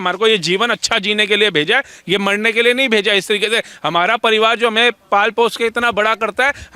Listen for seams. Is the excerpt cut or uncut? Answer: uncut